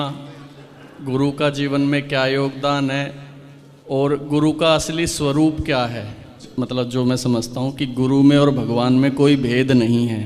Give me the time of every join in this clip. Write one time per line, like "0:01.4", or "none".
0:06.4

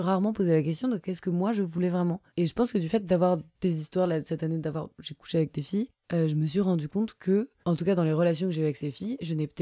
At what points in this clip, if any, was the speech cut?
0:05.0
0:06.0

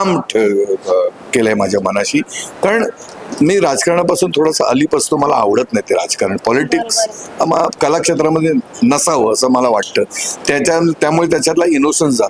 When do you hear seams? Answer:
none

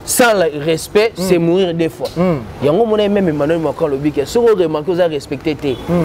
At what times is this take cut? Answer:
none

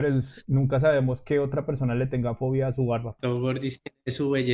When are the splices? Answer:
0:03.2

